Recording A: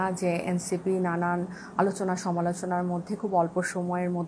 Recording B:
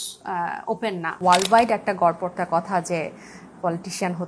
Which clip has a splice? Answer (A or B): B